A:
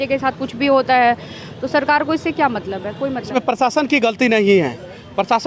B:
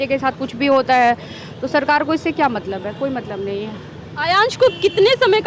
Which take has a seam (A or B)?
A